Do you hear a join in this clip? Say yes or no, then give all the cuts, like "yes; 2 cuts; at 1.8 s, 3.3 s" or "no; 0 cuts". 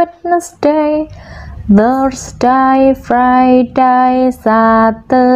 no; 0 cuts